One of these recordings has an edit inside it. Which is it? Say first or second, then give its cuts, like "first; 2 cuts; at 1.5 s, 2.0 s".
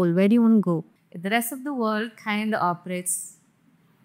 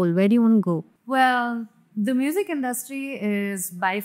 first; 1 cut; at 0.9 s